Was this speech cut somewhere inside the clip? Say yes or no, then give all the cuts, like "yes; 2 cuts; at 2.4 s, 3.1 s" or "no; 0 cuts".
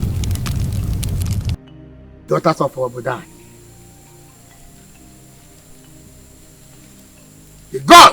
yes; 1 cut; at 2.2 s